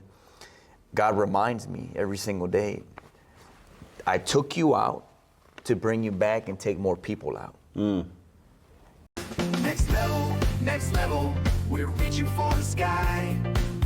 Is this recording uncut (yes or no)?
no